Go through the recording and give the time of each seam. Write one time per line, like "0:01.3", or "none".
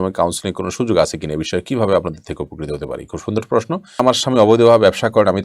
0:04.0